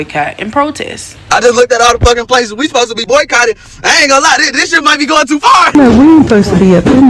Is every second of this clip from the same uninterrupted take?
no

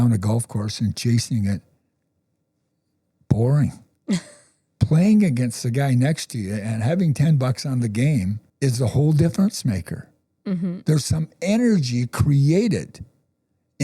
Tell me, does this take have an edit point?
yes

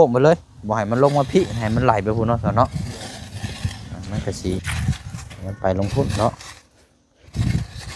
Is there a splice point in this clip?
yes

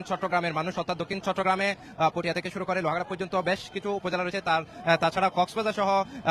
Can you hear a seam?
no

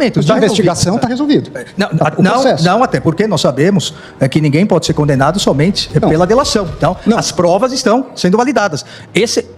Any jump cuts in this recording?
no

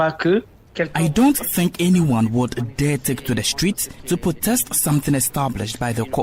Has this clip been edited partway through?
no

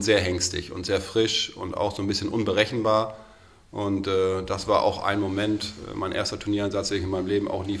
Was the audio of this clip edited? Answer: no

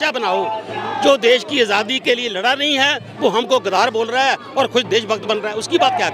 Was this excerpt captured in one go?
yes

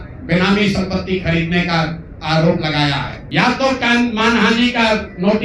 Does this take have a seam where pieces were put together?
yes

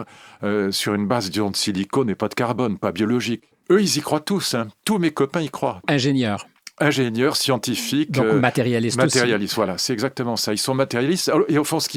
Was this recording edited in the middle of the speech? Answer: yes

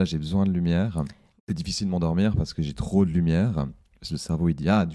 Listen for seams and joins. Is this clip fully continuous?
no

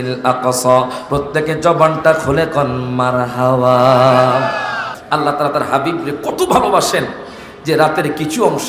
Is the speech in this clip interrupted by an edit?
yes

